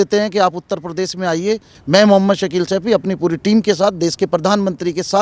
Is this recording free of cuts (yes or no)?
no